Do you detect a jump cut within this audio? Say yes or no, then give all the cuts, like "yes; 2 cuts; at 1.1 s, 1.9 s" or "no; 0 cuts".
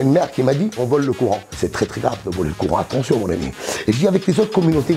no; 0 cuts